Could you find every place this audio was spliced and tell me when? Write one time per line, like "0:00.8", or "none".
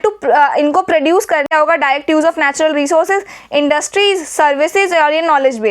0:01.5